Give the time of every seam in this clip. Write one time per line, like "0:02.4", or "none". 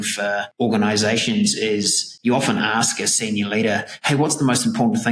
none